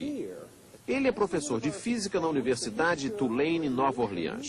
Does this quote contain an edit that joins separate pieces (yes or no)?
yes